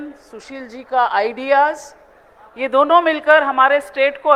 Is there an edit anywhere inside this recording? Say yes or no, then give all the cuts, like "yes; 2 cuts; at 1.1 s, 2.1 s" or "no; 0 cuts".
no; 0 cuts